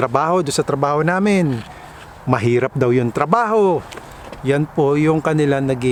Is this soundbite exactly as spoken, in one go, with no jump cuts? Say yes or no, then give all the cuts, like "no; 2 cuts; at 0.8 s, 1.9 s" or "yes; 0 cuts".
yes; 0 cuts